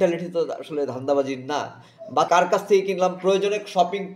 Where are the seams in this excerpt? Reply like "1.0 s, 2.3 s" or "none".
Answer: 2.3 s